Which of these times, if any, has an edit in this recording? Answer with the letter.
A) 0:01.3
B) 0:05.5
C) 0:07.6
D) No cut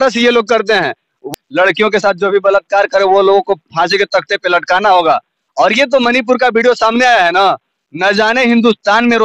A